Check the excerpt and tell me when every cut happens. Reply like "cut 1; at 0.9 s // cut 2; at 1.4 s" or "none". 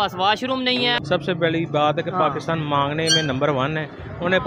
cut 1; at 1.0 s